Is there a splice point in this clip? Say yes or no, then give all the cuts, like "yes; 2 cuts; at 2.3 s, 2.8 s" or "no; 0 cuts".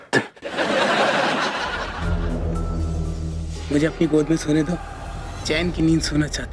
yes; 1 cut; at 2.0 s